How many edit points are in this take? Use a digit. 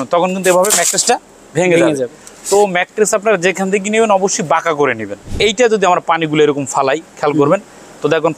1